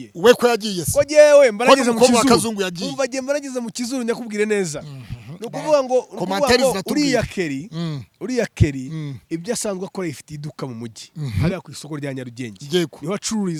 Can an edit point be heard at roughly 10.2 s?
no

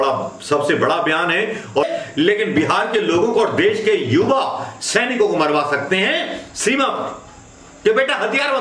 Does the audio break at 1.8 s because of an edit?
yes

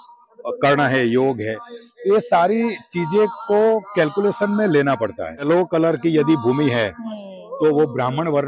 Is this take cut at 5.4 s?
yes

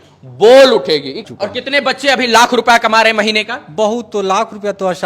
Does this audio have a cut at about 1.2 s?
yes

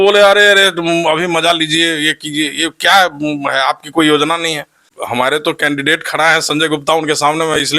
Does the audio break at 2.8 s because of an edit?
no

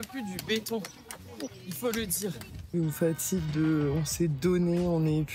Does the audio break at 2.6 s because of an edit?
yes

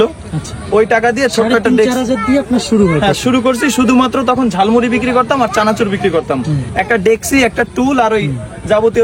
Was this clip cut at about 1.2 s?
no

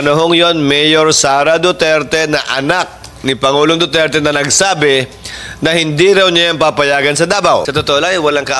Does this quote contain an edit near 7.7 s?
yes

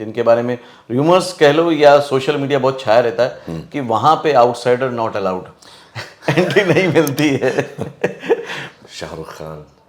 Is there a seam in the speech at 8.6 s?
yes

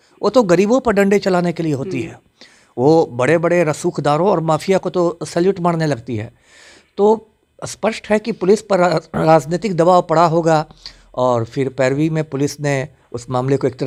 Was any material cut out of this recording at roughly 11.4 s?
no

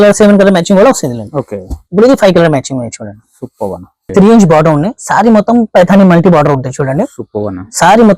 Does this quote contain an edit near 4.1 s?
yes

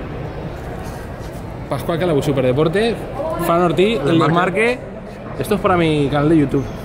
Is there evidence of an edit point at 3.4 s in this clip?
no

